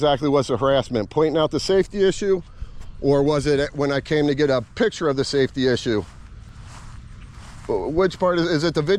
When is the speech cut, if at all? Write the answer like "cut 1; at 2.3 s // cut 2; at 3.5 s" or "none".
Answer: none